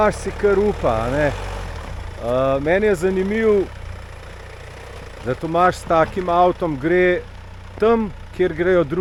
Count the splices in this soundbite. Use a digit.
0